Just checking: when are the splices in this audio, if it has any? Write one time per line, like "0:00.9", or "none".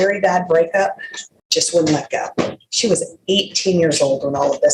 none

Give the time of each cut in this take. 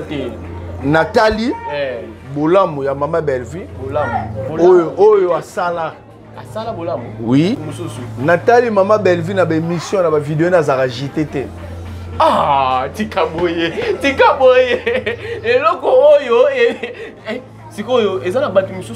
0:07.6

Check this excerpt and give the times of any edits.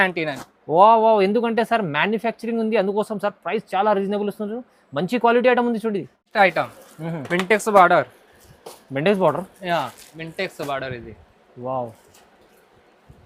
none

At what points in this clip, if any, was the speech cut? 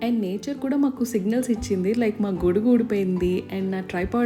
none

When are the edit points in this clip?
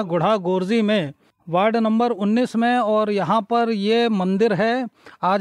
none

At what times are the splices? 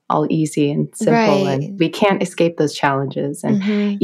0:01.8

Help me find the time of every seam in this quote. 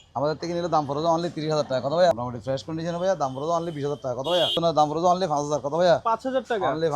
0:02.1
0:04.6

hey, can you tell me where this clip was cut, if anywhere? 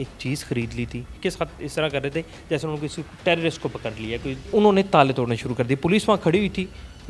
0:01.2
0:04.5

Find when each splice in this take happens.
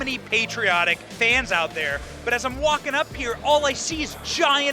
0:01.1

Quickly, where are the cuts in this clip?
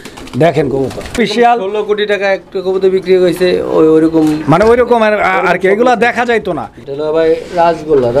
0:01.1
0:06.8

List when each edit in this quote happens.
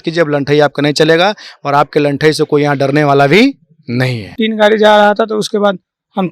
0:04.3

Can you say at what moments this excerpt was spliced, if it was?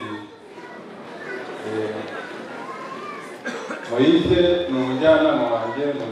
none

